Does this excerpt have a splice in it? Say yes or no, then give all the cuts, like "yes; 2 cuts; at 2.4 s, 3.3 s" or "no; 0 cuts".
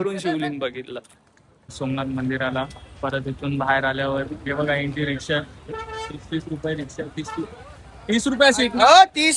yes; 1 cut; at 1.7 s